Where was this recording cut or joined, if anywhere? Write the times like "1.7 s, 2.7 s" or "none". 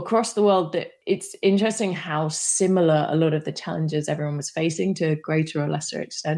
0.9 s